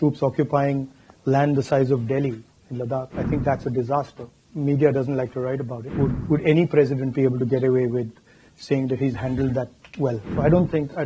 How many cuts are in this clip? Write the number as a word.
three